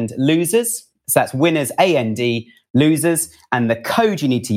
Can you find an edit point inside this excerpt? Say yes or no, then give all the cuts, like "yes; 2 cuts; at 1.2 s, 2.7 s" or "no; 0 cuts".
no; 0 cuts